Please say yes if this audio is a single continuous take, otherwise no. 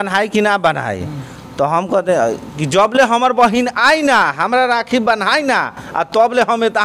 yes